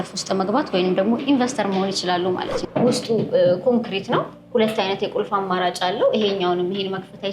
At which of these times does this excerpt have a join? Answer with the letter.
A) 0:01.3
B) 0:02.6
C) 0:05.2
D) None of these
B